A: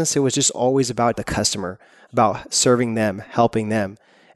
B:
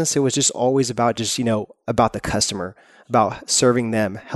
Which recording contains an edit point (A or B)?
A